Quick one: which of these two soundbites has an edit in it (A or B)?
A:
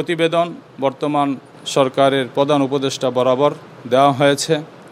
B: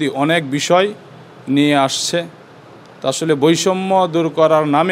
A